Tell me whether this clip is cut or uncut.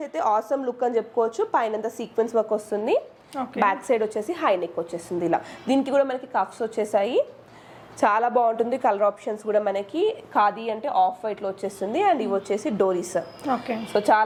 uncut